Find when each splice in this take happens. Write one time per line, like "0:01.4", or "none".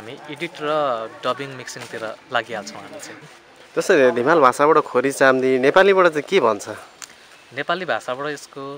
0:03.1